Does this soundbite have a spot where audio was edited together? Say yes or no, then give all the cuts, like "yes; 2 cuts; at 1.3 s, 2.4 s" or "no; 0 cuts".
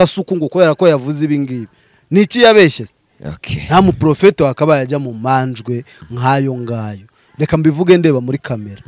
yes; 1 cut; at 2.8 s